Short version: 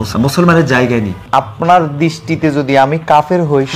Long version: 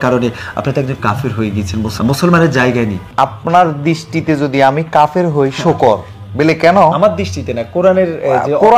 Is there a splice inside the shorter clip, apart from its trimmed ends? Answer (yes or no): no